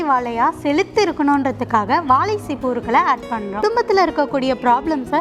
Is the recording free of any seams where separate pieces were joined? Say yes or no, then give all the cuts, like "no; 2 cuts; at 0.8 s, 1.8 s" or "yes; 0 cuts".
no; 1 cut; at 3.6 s